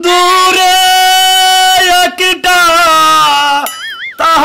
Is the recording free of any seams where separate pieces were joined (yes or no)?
yes